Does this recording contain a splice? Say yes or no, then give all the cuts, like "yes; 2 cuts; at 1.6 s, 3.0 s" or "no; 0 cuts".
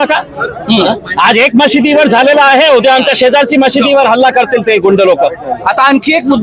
no; 0 cuts